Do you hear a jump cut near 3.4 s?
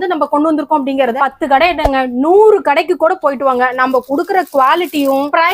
no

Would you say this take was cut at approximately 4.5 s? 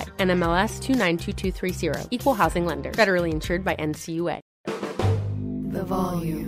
yes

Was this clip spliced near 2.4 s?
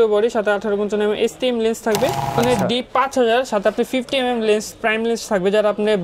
yes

